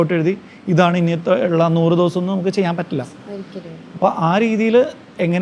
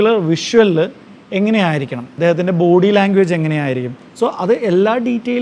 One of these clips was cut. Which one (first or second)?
second